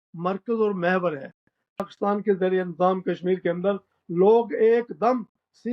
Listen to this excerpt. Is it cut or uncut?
cut